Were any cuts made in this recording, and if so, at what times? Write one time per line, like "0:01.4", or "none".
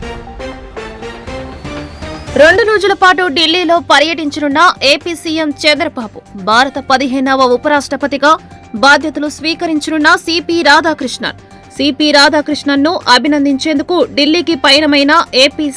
0:01.8